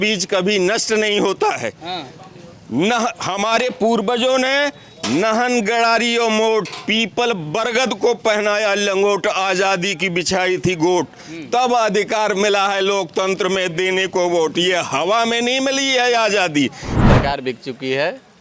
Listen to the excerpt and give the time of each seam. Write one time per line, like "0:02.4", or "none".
0:17.1